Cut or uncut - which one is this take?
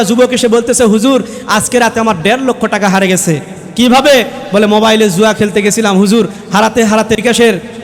uncut